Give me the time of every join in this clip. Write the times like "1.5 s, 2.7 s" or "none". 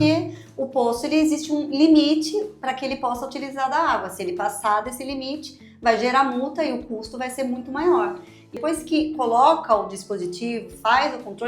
8.6 s